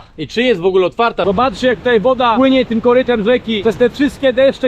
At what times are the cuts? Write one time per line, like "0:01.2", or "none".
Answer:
0:01.2
0:02.3
0:03.5